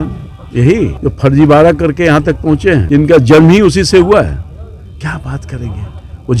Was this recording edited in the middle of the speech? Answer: yes; 2 cuts; at 1.0 s, 2.8 s

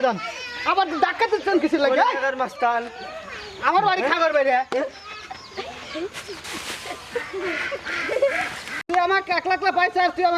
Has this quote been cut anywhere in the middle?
yes; 1 cut; at 8.7 s

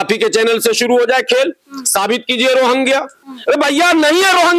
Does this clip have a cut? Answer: yes; 1 cut; at 3.3 s

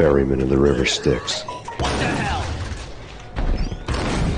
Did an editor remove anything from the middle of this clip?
no; 0 cuts

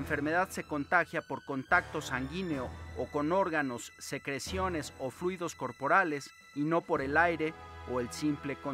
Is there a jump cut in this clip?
no; 0 cuts

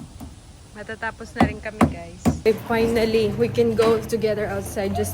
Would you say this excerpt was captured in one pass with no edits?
no; 1 cut; at 2.5 s

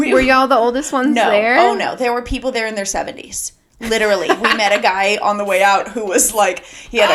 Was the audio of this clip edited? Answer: no; 0 cuts

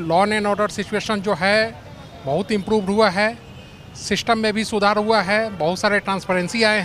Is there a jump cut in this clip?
no; 0 cuts

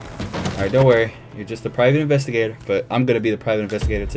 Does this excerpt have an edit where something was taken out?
no; 0 cuts

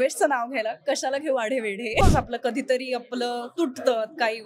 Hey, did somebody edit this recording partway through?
yes; 1 cut; at 2.0 s

